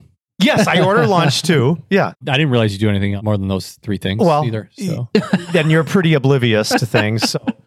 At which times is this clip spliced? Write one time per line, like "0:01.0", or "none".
0:03.2